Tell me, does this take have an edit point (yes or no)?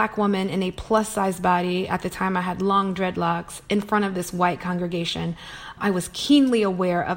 no